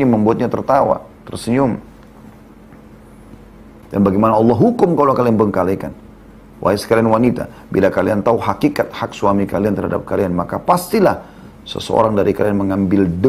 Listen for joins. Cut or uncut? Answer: cut